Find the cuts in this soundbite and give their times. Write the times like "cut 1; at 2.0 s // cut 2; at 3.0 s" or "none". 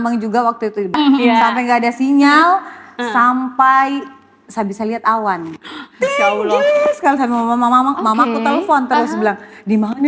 cut 1; at 0.9 s